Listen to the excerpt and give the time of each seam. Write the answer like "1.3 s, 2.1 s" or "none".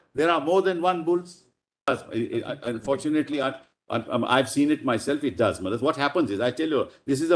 1.9 s